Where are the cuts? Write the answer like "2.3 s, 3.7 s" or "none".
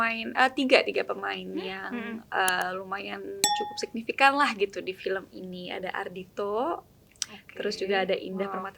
none